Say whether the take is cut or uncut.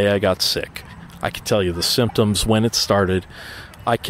uncut